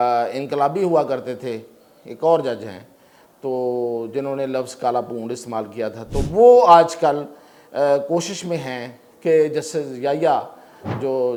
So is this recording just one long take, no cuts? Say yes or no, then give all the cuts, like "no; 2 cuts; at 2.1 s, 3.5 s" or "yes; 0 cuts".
yes; 0 cuts